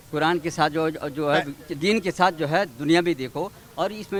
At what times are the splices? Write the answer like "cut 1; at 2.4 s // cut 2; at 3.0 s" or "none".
none